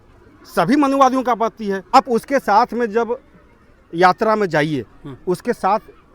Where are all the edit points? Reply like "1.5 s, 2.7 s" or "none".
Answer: 1.9 s

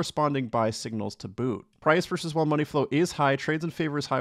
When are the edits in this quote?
1.8 s

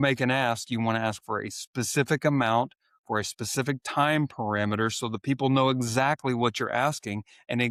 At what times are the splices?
none

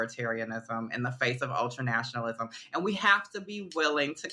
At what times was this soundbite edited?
none

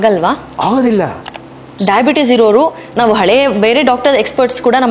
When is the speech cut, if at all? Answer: 1.7 s

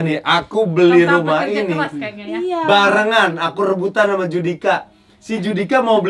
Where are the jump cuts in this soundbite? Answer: none

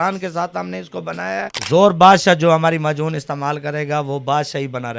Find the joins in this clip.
1.5 s

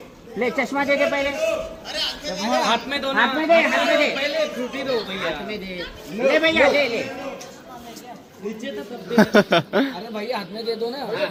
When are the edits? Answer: none

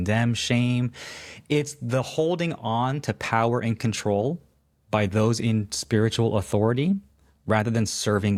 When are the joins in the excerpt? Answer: none

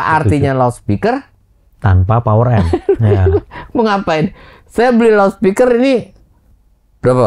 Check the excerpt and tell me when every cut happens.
none

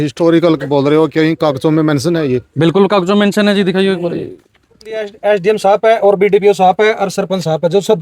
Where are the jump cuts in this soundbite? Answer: 5.1 s

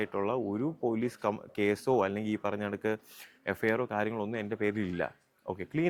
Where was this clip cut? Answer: none

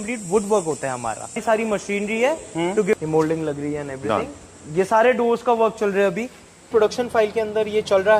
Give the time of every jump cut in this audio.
1.4 s, 2.9 s, 6.7 s

